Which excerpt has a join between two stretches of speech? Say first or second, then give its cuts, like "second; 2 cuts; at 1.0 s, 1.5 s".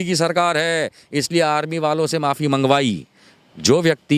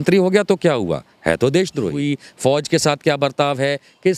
second; 1 cut; at 2.0 s